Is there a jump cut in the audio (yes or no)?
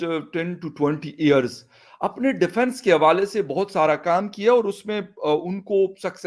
no